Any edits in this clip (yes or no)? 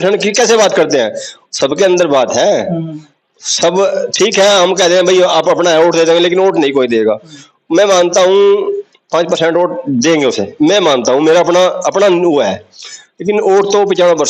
no